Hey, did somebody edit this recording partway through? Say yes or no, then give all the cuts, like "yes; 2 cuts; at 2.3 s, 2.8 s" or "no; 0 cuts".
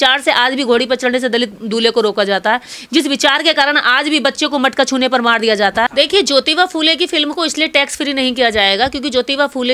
yes; 1 cut; at 5.9 s